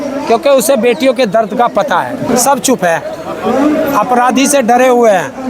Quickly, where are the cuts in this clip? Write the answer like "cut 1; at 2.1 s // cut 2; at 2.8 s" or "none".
cut 1; at 2.2 s